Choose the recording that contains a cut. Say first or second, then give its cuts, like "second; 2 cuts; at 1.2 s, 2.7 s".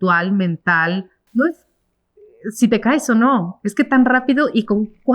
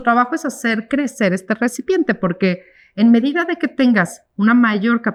first; 1 cut; at 1.2 s